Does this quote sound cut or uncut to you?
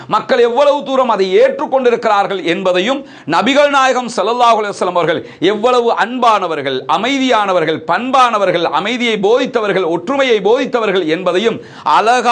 uncut